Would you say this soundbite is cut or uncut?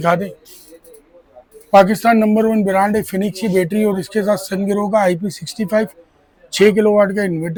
uncut